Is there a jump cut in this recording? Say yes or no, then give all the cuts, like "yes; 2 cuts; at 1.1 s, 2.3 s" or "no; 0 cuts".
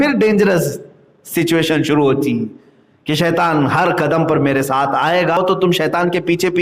yes; 1 cut; at 5.4 s